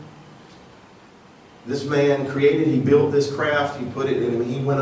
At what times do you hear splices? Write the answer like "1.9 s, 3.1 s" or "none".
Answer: 1.0 s

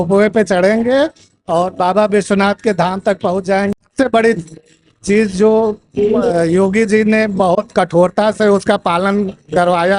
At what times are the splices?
3.9 s

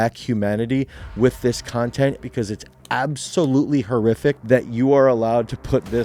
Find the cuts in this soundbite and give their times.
2.2 s, 4.4 s

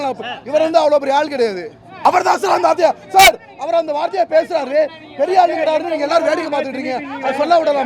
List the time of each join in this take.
1.9 s

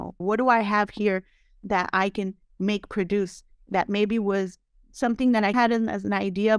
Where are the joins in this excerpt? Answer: none

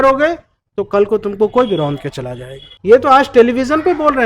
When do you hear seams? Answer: 2.7 s

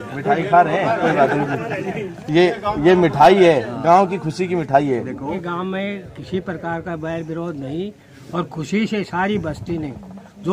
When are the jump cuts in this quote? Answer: 5.4 s

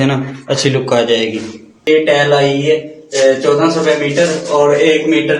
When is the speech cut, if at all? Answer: 1.8 s

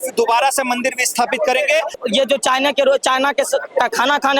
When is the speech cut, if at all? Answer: 2.0 s

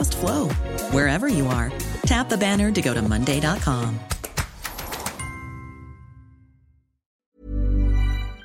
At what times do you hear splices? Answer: 7.1 s

